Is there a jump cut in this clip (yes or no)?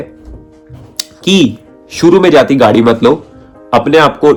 no